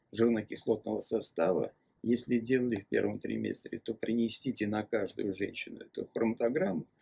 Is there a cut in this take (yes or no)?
no